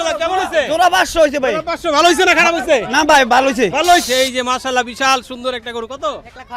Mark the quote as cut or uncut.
cut